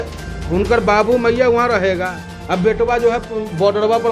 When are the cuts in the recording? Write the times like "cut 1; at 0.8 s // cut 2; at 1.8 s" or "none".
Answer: none